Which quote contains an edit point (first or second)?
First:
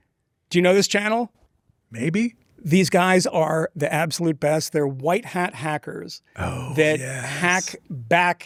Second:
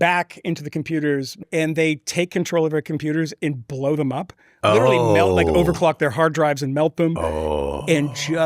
second